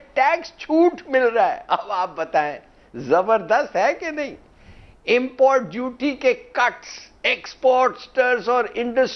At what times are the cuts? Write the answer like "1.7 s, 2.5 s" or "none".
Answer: none